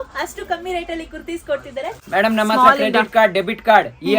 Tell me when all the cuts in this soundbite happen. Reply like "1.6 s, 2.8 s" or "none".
2.0 s